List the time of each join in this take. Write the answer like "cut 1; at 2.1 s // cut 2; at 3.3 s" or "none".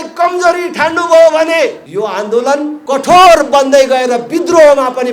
cut 1; at 1.8 s // cut 2; at 2.8 s